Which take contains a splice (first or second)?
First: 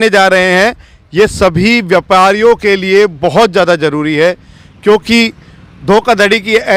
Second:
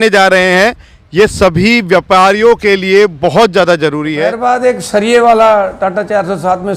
second